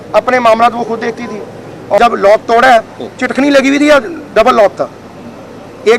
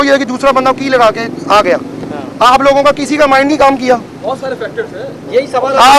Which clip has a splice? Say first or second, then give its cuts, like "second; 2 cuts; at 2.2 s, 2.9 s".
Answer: first; 1 cut; at 2.0 s